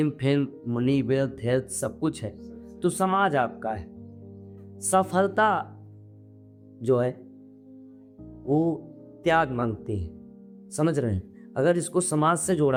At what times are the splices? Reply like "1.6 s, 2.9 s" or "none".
none